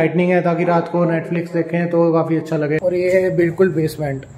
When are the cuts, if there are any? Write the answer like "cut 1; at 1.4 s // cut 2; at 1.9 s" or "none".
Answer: cut 1; at 2.8 s